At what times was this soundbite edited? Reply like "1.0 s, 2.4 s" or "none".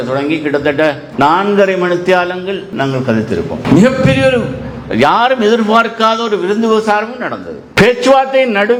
none